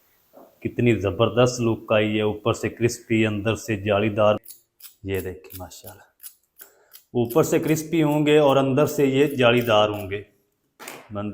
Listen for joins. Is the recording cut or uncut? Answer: cut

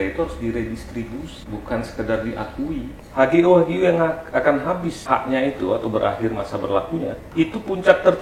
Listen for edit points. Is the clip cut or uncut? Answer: cut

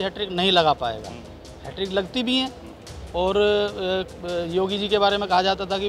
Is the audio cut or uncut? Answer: uncut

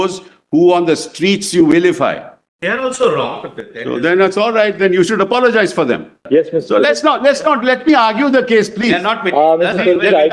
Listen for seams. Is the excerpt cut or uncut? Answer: cut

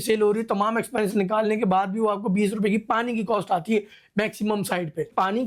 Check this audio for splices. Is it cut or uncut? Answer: uncut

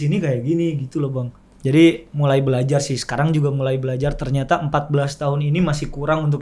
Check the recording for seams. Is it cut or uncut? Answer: uncut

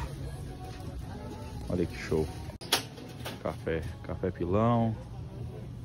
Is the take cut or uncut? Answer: cut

